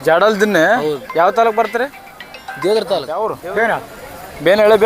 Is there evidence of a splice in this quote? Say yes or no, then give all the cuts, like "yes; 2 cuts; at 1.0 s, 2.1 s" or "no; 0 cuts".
yes; 1 cut; at 3.4 s